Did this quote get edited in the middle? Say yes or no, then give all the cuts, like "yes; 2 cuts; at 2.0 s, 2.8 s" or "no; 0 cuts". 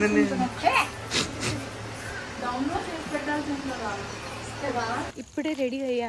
no; 0 cuts